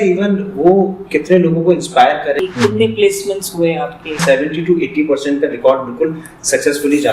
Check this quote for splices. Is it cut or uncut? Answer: cut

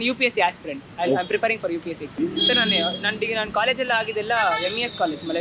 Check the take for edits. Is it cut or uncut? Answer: uncut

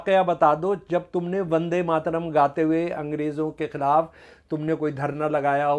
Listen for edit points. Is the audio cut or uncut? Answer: uncut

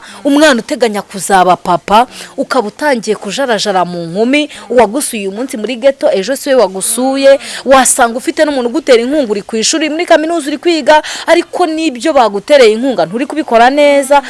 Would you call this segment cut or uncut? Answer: uncut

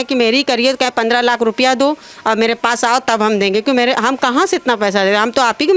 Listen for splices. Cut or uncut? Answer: uncut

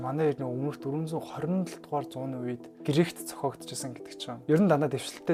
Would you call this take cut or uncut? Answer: uncut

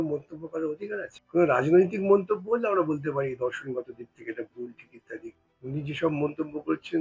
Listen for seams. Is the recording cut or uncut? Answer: cut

